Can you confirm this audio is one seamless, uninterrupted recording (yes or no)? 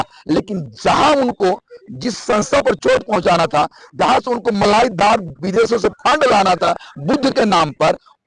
yes